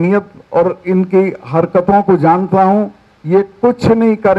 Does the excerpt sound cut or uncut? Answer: uncut